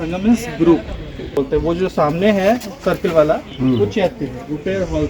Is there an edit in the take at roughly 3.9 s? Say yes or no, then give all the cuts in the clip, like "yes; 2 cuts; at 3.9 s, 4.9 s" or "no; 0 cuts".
no; 1 cut; at 1.4 s